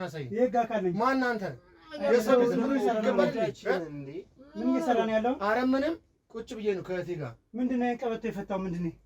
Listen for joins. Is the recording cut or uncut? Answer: uncut